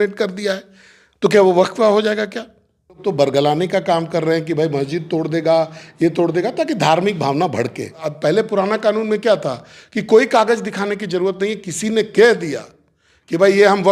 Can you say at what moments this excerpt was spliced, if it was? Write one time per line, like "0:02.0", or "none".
0:03.0
0:08.0

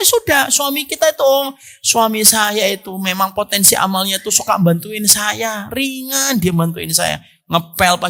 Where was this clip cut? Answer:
none

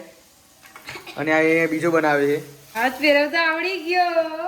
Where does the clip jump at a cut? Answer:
0:02.6

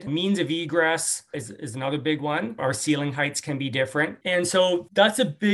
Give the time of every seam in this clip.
0:04.3

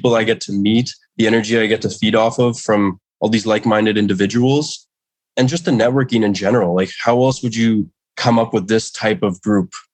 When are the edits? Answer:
0:08.0

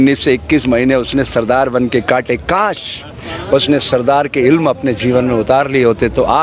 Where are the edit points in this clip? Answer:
none

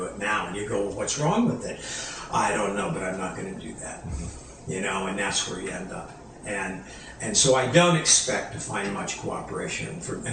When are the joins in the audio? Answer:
none

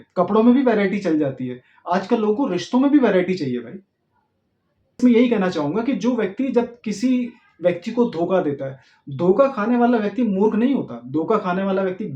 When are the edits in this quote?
0:05.0

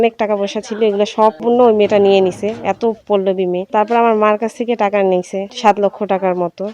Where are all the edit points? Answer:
0:01.4
0:03.6
0:05.4

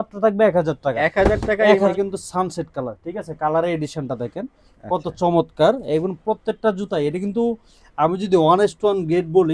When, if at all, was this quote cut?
0:01.9

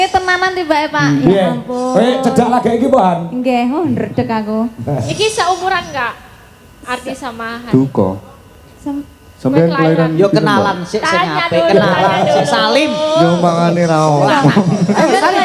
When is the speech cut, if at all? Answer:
none

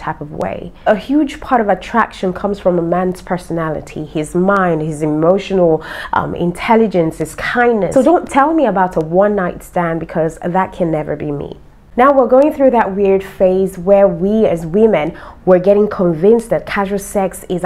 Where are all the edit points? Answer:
0:00.9
0:07.9

